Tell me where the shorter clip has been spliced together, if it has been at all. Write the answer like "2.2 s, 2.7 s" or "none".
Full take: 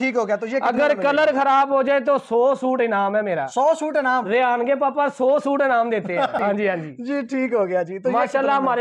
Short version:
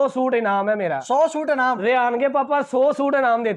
none